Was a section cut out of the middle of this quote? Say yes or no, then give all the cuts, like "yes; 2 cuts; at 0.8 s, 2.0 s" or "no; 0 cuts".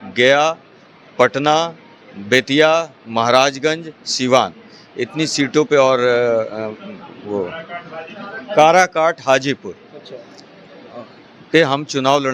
no; 0 cuts